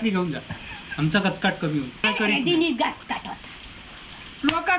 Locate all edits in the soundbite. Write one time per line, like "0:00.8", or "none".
0:02.1